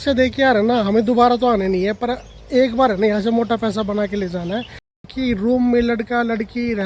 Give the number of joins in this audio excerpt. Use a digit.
1